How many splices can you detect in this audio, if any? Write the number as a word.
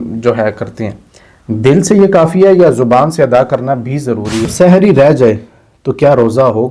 one